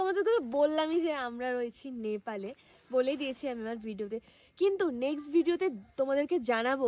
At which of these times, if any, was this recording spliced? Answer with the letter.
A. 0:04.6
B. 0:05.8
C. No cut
C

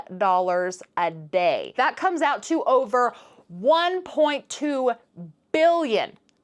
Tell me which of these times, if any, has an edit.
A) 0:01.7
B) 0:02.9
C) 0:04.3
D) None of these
A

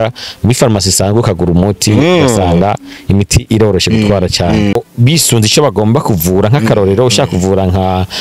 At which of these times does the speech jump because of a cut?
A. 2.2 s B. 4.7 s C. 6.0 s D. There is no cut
B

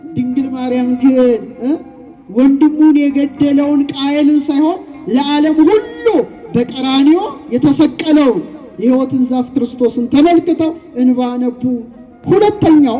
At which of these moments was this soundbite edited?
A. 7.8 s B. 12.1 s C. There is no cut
B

